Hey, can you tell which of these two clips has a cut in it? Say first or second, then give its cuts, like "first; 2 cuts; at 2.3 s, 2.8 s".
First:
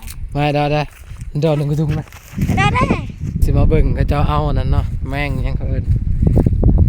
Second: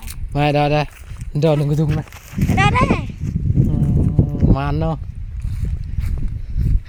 first; 1 cut; at 3.4 s